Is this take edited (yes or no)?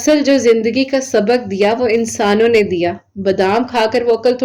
no